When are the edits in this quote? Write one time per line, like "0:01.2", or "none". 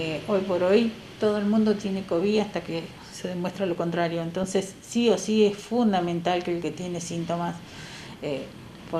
none